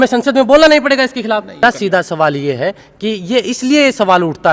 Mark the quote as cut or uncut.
cut